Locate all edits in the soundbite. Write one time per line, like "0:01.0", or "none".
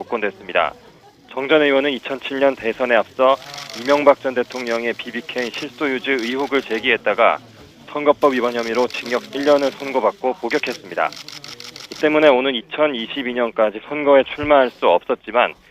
0:08.3